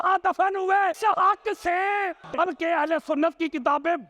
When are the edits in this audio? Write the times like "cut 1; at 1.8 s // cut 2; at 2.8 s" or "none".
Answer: cut 1; at 1.0 s // cut 2; at 2.3 s